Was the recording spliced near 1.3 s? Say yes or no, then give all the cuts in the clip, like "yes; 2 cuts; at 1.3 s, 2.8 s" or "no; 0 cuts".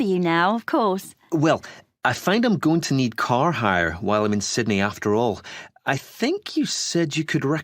no; 1 cut; at 4.5 s